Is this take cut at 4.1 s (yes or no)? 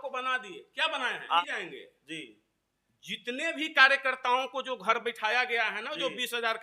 no